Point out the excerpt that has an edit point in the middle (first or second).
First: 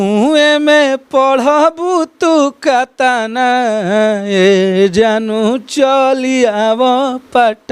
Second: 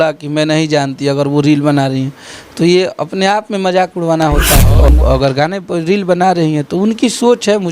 second